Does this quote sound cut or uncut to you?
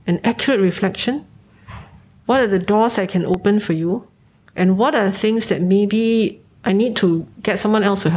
cut